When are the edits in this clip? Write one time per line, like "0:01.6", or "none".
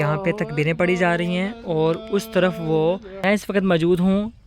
0:03.2